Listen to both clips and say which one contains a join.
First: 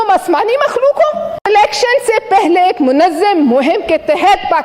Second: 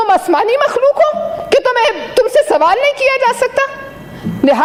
first; 1 cut; at 1.3 s

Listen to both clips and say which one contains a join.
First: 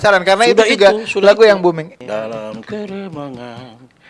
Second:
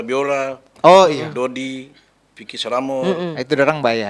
first; 1 cut; at 2.0 s

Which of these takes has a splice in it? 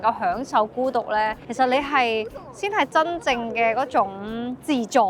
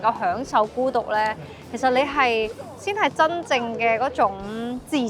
first; 1 cut; at 1.4 s

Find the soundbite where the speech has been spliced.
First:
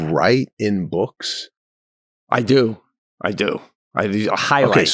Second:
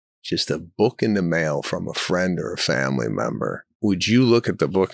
second; 1 cut; at 3.7 s

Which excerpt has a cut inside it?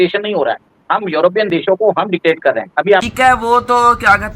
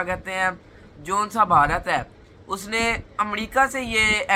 first; 1 cut; at 3.1 s

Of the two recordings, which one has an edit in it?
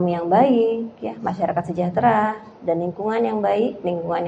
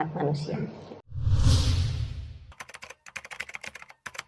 second; 1 cut; at 1.1 s

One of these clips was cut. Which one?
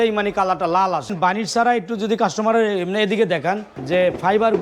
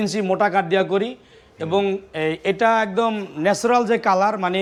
first; 2 cuts; at 1.1 s, 3.7 s

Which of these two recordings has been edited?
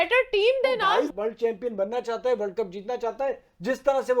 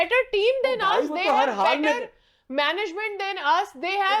first; 1 cut; at 1.1 s

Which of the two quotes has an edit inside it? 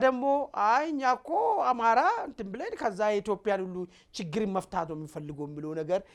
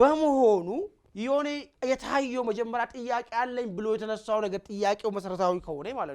second; 1 cut; at 1.0 s

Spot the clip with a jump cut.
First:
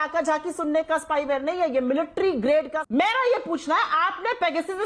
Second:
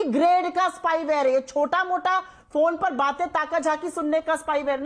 first; 1 cut; at 2.8 s

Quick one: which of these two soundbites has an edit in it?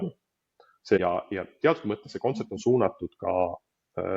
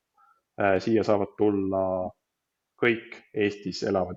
first; 1 cut; at 1.0 s

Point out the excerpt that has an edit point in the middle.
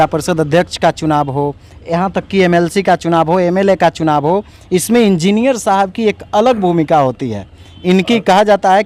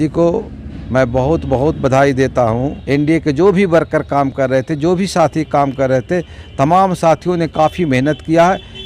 second; 1 cut; at 2.8 s

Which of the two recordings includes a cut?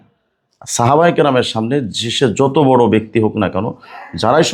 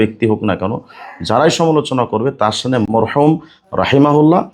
second; 1 cut; at 2.9 s

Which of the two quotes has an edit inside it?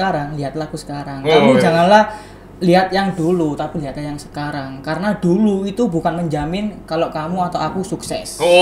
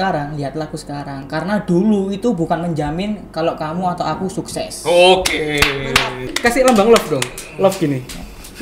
second; 2 cuts; at 1.2 s, 6.3 s

